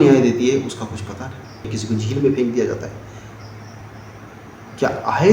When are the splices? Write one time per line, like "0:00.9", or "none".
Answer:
0:01.7